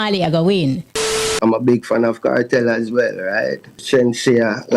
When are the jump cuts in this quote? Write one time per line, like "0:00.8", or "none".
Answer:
0:01.3
0:03.7